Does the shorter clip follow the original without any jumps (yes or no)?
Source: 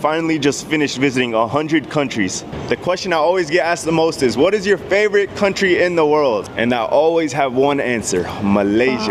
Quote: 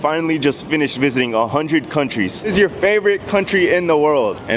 no